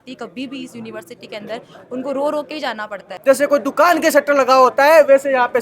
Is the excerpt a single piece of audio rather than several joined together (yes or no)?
no